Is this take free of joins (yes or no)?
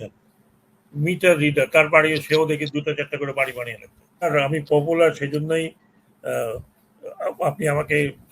no